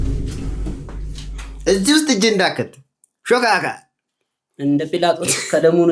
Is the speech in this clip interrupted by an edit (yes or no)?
no